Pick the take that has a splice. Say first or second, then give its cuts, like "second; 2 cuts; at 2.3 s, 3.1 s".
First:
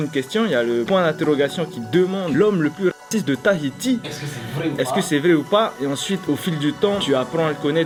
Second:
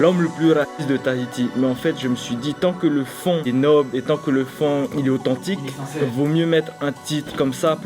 second; 1 cut; at 6.1 s